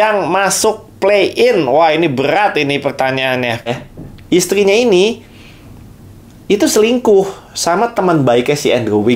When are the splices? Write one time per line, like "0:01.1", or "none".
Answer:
0:03.7